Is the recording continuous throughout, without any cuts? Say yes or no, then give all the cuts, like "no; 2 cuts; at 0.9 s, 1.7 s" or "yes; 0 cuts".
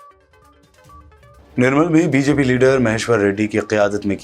no; 1 cut; at 1.1 s